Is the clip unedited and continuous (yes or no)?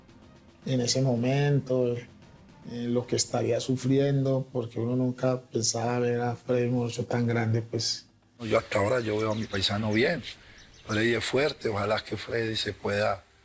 yes